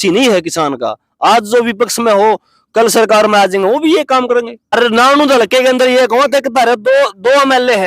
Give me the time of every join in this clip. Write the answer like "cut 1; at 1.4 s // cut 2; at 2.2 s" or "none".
cut 1; at 4.7 s